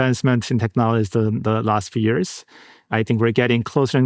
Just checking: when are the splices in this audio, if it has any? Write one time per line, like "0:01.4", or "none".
0:02.8

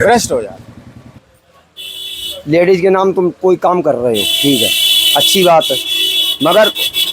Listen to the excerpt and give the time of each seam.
0:01.2

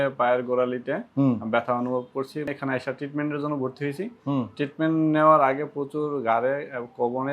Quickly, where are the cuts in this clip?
0:02.5

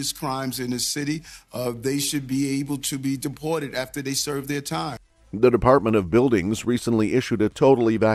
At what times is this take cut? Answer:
none

